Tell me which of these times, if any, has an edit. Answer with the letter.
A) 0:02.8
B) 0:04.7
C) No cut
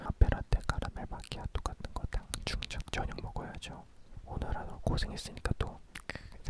A